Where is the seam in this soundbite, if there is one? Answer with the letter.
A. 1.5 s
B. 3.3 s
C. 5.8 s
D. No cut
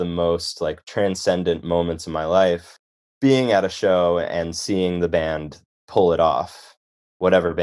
C